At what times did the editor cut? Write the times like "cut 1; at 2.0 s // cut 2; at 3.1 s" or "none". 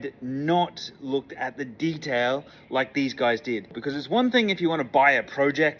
cut 1; at 3.8 s